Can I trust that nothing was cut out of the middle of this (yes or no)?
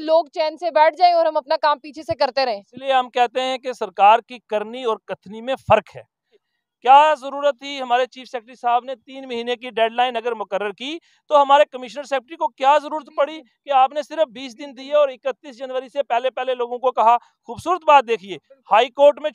no